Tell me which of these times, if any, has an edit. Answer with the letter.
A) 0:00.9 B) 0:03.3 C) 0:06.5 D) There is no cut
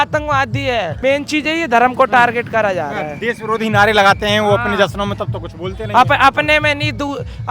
A